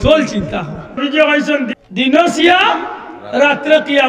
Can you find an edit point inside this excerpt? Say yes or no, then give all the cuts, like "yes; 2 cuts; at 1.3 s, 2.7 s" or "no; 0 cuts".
yes; 2 cuts; at 1.0 s, 1.7 s